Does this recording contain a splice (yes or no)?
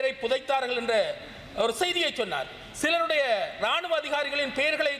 no